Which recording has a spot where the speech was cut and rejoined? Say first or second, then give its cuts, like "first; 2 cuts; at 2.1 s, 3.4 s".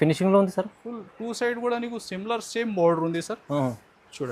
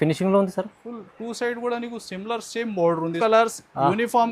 second; 1 cut; at 3.2 s